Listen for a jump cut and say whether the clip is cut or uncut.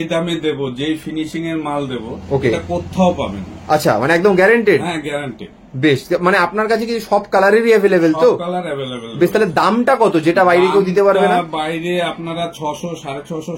uncut